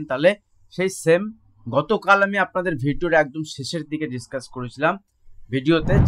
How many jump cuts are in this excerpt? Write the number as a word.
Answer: zero